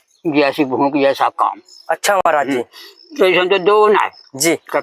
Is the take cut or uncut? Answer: uncut